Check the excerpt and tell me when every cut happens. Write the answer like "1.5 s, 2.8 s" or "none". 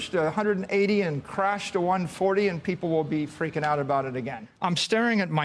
4.4 s

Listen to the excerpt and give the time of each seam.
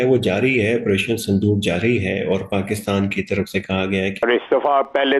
4.2 s

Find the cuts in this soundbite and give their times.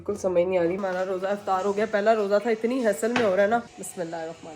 0.8 s, 3.7 s

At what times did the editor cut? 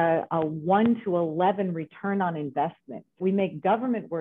3.2 s

